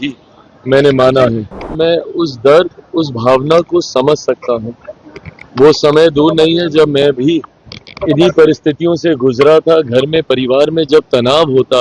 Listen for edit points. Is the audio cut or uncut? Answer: cut